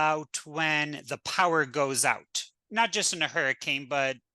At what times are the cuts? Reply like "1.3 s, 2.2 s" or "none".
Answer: 2.6 s